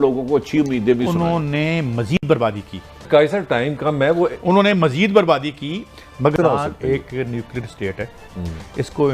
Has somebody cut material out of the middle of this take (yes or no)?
no